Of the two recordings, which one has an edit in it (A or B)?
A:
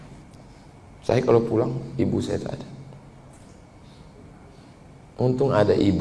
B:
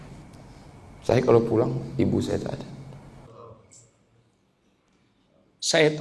B